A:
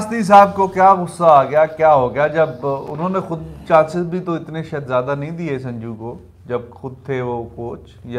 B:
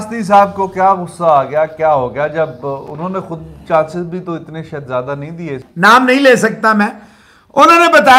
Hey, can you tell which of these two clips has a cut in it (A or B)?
B